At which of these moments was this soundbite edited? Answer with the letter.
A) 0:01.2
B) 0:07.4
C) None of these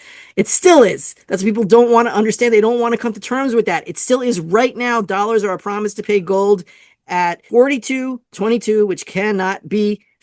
B